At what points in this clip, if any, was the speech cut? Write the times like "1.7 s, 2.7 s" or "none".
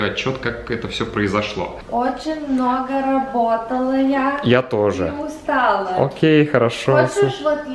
1.7 s

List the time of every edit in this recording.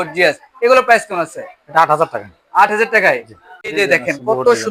none

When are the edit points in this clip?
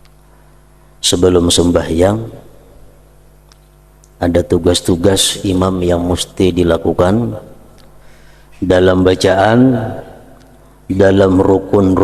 none

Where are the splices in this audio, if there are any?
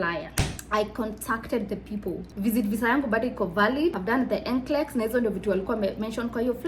2.3 s, 4.0 s

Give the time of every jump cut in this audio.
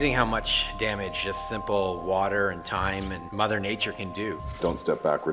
3.2 s, 4.6 s

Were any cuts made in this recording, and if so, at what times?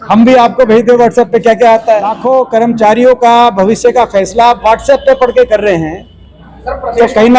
2.1 s

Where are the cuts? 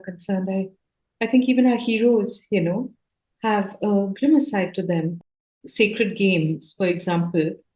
5.2 s

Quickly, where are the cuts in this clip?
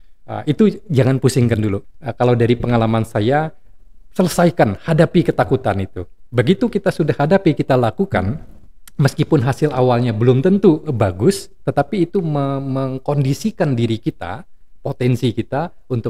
1.9 s

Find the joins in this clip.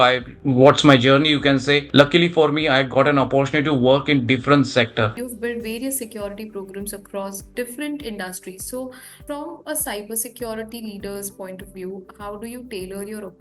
5.1 s

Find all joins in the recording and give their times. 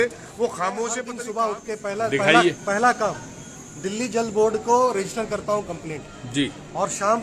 1.2 s

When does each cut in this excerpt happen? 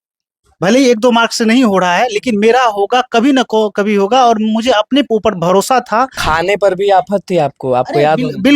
6.2 s

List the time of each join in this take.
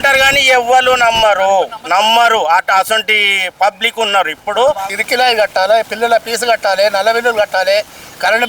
5.0 s

